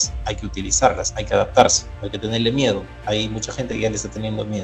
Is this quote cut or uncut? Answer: cut